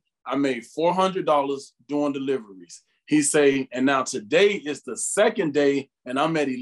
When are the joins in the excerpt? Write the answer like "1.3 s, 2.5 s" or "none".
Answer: none